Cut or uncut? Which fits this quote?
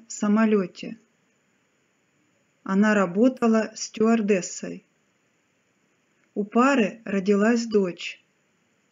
uncut